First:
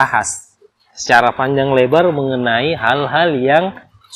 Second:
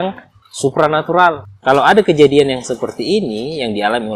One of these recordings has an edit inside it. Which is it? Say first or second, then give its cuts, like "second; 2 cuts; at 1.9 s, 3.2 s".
second; 1 cut; at 1.5 s